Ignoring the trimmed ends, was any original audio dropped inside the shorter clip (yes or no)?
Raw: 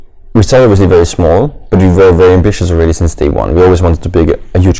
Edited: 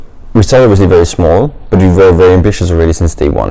no